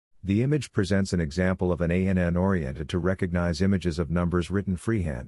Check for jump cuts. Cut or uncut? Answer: uncut